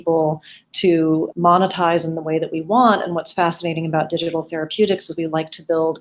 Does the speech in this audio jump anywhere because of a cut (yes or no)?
yes